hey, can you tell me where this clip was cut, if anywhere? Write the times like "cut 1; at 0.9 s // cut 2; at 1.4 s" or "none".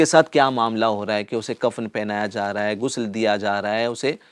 none